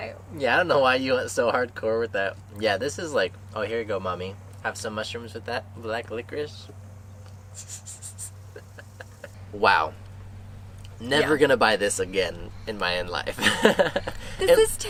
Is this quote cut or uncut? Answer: uncut